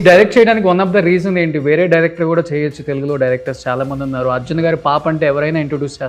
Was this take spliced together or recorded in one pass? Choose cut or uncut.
uncut